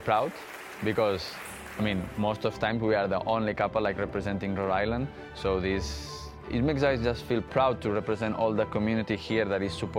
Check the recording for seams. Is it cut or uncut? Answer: uncut